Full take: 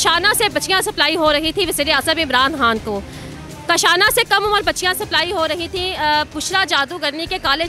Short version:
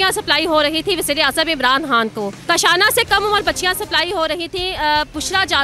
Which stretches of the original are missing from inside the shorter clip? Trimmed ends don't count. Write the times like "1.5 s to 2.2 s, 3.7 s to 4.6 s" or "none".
3.1 s to 3.6 s

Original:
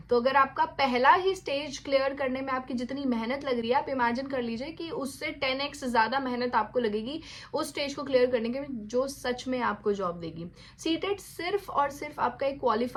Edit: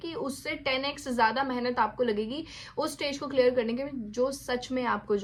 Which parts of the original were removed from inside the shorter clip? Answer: none

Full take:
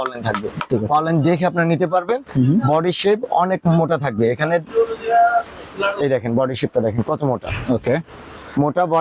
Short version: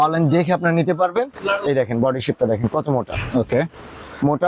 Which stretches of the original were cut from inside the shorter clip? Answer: 2.3 s to 5.7 s

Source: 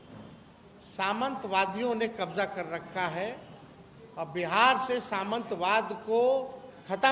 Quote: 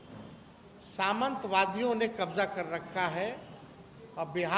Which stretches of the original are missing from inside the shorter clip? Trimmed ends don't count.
none

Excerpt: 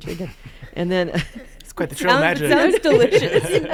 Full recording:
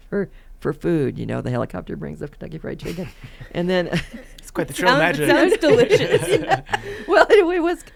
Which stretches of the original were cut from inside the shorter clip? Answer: none

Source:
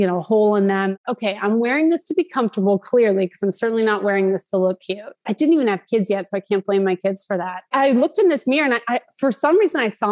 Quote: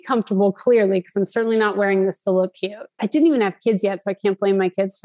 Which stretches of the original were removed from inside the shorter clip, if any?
none

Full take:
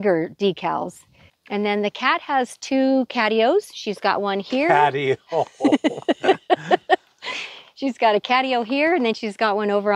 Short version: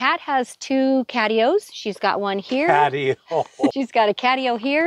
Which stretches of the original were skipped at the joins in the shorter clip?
5.7 s to 7.8 s

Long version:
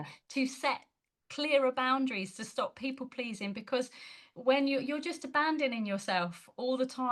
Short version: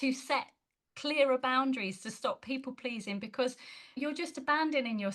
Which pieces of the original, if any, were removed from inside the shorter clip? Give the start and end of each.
4.3 s to 4.8 s

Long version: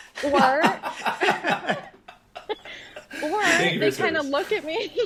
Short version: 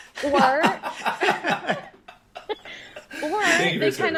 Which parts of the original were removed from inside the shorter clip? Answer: none

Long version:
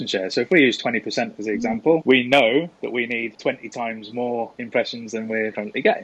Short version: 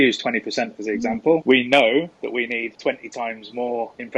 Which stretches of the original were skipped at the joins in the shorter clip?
none

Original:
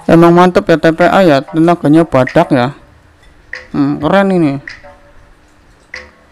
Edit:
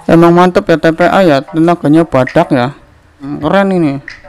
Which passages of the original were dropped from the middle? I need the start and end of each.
3.3 s to 3.9 s

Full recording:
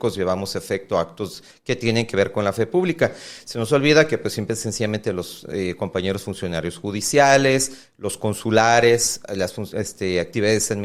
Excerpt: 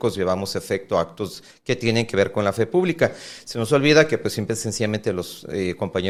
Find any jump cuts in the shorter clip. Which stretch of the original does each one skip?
none

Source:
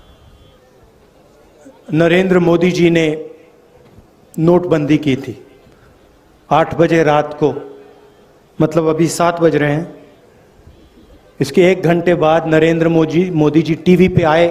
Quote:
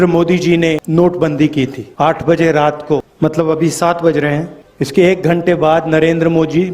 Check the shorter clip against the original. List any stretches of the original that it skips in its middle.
3.2 s to 4.3 s, 5.3 s to 6.3 s, 7.6 s to 8.5 s, 10.0 s to 11.2 s

